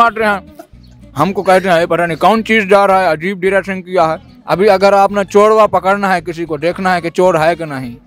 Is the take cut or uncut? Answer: cut